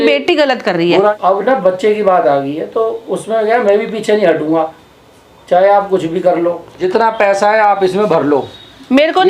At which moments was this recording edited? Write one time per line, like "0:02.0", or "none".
0:01.2
0:06.7